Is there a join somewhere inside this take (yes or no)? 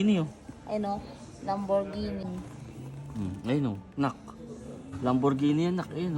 yes